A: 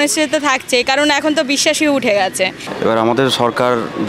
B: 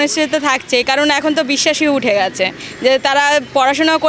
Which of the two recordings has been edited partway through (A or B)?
A